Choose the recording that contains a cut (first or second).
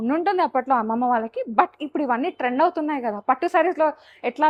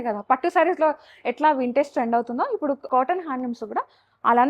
second